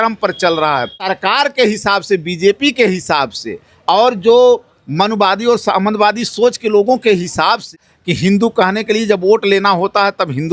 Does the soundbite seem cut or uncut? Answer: cut